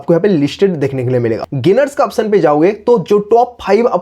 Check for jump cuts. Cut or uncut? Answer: cut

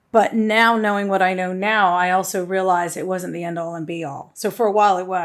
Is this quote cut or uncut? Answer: uncut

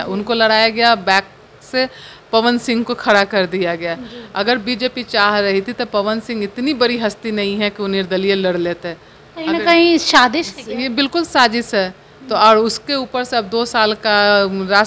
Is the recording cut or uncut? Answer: uncut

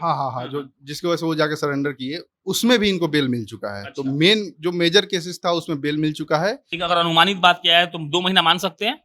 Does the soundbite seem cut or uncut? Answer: cut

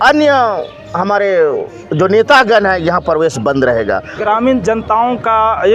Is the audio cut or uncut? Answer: cut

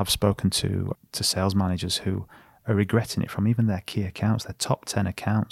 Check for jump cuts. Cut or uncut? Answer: cut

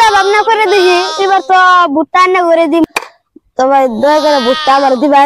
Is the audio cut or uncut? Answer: cut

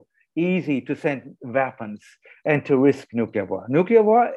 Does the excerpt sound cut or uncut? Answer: uncut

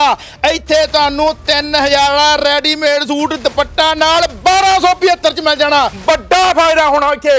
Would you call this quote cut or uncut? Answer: cut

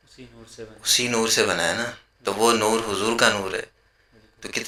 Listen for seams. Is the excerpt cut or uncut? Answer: uncut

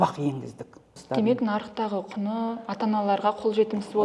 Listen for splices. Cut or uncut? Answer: cut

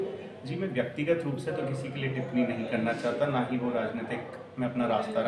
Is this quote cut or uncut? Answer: uncut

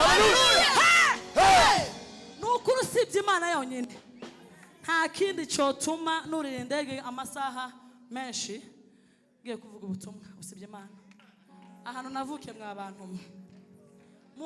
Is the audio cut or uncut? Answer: uncut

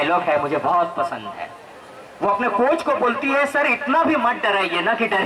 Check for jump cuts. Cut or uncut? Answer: uncut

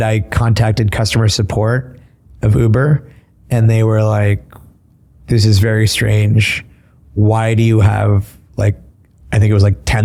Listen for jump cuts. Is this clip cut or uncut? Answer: uncut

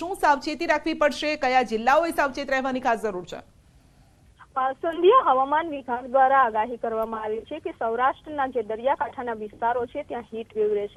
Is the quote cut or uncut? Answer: uncut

